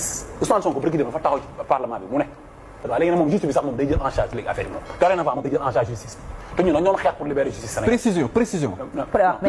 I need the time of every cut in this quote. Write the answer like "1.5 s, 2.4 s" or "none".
2.9 s